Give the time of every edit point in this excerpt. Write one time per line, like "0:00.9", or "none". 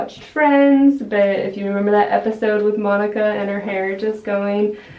none